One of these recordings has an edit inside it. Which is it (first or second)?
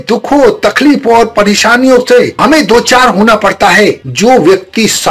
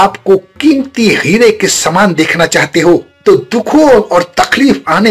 first